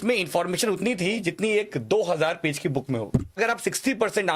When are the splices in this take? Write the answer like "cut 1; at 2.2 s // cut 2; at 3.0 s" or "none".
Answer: cut 1; at 3.4 s

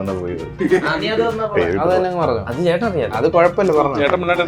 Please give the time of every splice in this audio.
none

